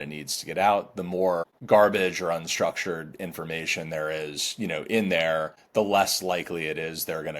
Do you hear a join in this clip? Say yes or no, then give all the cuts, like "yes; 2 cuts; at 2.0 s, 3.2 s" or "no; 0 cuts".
yes; 2 cuts; at 1.5 s, 5.6 s